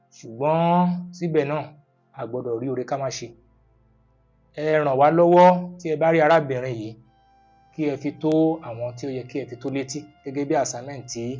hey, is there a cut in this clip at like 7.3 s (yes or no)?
no